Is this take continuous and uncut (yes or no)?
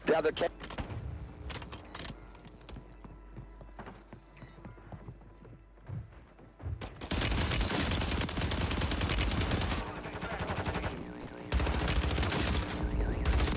yes